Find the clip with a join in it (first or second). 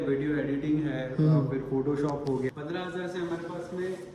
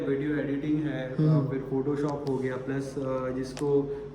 first